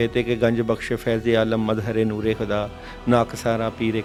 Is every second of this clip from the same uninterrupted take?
yes; 0 cuts

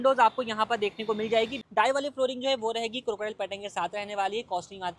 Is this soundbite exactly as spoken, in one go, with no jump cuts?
no; 1 cut; at 1.6 s

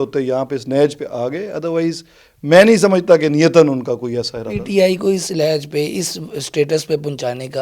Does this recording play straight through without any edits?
yes; 0 cuts

